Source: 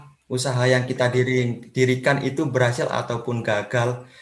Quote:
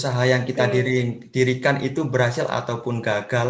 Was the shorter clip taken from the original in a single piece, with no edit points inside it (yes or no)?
yes